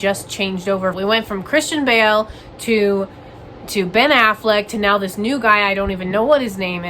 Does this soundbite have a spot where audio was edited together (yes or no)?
yes